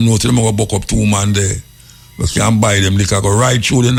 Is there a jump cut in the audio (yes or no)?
no